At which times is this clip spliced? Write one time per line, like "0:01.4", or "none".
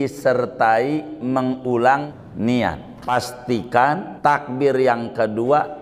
0:02.1
0:03.1
0:04.1